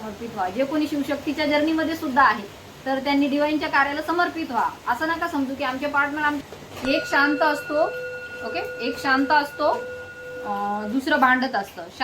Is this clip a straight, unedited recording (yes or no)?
no